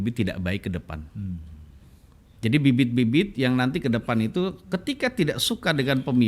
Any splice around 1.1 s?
no; 0 cuts

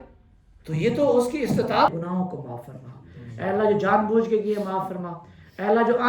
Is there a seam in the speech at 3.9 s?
no; 1 cut; at 1.9 s

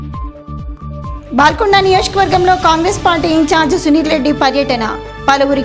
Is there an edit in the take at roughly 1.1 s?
no; 0 cuts

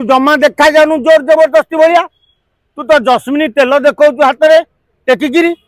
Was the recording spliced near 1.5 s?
no; 0 cuts

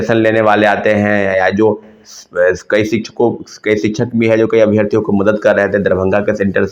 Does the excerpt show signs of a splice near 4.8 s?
no; 0 cuts

